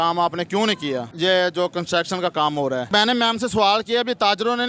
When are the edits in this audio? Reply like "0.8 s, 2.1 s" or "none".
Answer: 1.1 s, 2.9 s